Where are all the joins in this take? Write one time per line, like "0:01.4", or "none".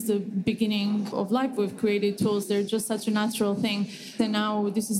0:01.1
0:04.1